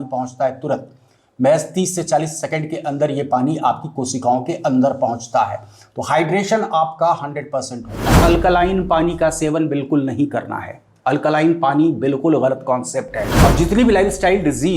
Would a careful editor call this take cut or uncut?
cut